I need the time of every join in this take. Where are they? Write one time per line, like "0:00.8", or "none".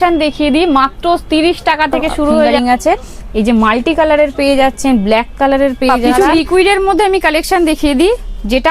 0:02.5
0:06.0